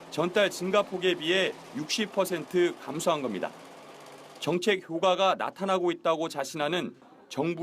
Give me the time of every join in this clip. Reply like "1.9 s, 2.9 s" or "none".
5.4 s